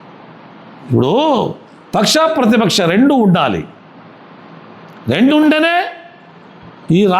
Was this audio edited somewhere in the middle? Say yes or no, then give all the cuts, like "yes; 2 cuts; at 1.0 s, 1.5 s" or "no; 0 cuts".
no; 0 cuts